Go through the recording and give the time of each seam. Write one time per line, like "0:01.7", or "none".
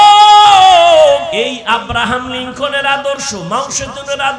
0:01.3